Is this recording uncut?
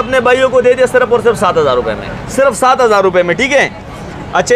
yes; 0 cuts

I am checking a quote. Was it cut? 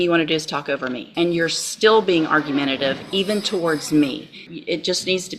yes; 2 cuts; at 1.1 s, 4.5 s

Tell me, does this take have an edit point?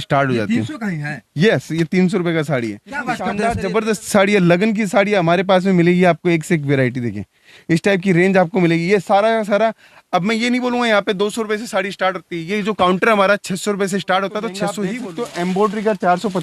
yes; 2 cuts; at 3.2 s, 14.8 s

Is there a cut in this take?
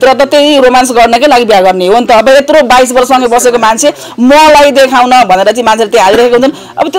no; 0 cuts

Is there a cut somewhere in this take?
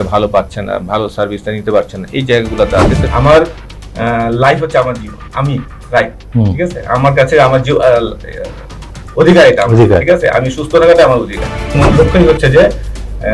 yes; 2 cuts; at 3.1 s, 11.8 s

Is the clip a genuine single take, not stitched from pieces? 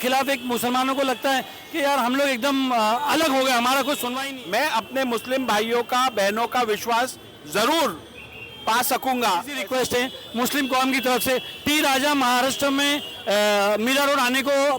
no; 2 cuts; at 4.2 s, 9.6 s

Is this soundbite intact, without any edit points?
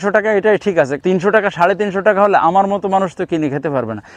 no; 1 cut; at 1.0 s

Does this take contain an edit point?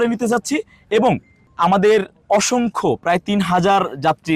no; 0 cuts

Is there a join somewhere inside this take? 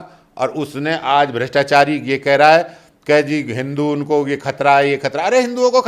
no; 0 cuts

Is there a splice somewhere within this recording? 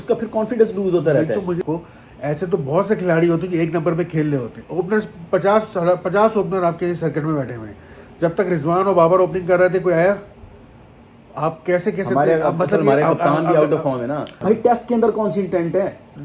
yes; 2 cuts; at 1.6 s, 14.3 s

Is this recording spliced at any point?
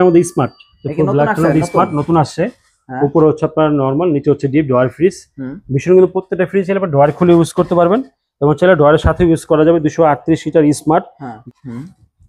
yes; 1 cut; at 11.3 s

